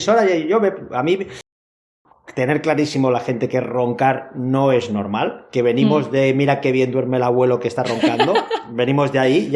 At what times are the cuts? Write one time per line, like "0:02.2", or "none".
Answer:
0:01.5